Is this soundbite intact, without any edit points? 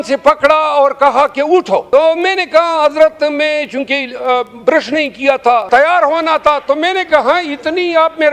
no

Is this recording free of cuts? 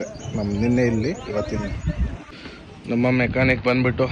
yes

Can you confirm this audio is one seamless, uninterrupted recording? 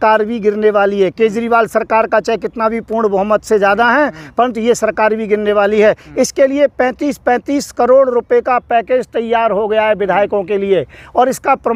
yes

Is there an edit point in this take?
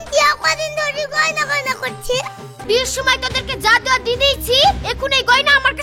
yes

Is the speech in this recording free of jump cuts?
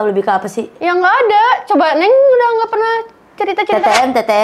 yes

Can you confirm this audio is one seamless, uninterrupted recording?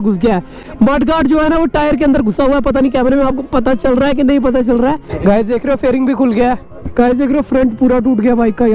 no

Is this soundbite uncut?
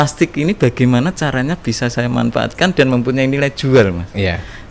yes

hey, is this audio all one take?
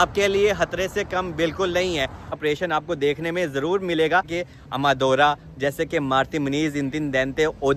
no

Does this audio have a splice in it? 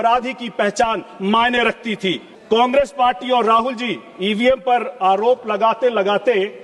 yes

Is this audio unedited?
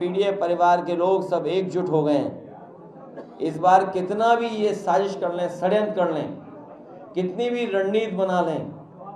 yes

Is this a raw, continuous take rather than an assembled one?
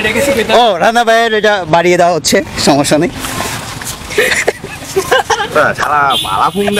yes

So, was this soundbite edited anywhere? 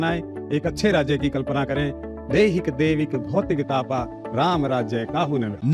no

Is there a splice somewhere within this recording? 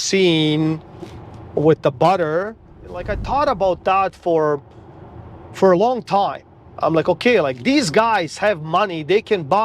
yes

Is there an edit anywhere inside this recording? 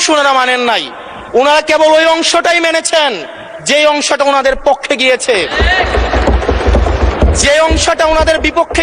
no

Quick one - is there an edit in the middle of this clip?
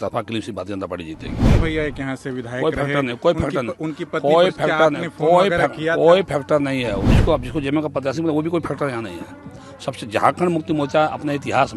yes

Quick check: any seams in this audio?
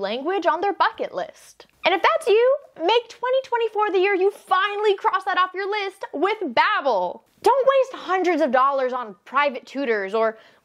no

